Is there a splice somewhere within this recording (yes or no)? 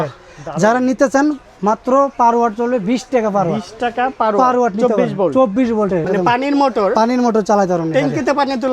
yes